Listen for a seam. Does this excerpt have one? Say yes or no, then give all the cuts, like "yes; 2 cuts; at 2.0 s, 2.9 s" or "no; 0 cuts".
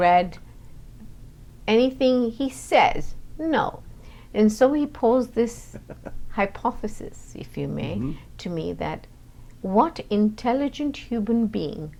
no; 0 cuts